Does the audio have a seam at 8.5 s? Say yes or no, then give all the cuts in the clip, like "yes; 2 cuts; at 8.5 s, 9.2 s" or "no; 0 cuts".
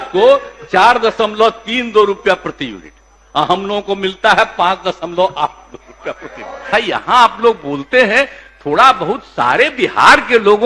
no; 1 cut; at 6.6 s